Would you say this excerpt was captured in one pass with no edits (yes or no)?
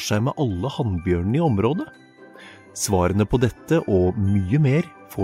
yes